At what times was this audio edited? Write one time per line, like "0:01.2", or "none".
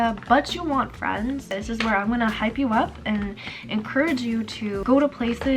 0:01.5
0:04.8